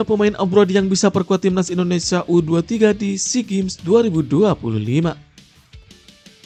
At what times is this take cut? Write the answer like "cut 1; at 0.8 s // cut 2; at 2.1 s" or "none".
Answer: none